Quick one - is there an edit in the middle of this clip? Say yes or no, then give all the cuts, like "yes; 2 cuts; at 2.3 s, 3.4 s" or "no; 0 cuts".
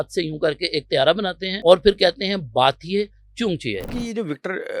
yes; 2 cuts; at 1.5 s, 3.9 s